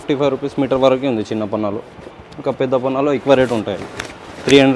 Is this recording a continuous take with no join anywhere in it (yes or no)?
yes